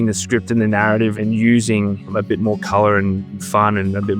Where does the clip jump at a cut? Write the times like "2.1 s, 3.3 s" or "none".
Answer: 1.2 s, 2.1 s, 3.3 s